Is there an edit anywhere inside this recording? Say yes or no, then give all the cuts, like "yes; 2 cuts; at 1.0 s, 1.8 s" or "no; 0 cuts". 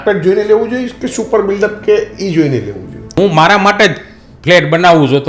yes; 1 cut; at 3.2 s